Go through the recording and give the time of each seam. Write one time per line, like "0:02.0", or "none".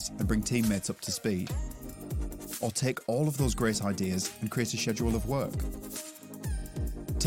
0:01.9
0:06.2